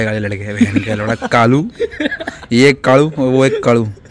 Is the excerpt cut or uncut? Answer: uncut